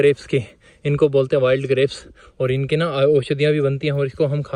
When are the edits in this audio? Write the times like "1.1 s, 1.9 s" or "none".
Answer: none